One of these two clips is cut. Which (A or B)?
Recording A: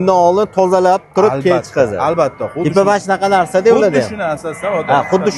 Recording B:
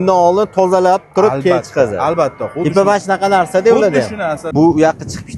B